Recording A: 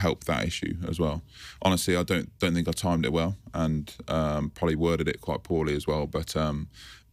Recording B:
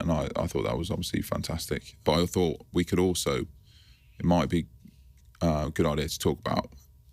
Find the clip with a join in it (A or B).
B